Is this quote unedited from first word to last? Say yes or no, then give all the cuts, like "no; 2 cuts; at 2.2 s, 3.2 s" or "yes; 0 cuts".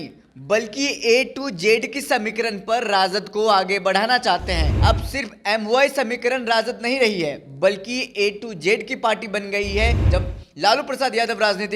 no; 2 cuts; at 4.7 s, 10.0 s